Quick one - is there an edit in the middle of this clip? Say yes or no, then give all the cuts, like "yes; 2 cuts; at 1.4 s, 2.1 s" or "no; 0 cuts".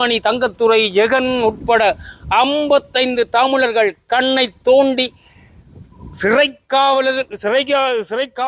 no; 0 cuts